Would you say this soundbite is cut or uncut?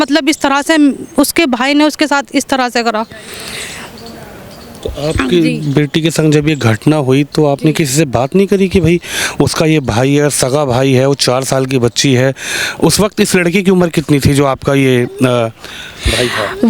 uncut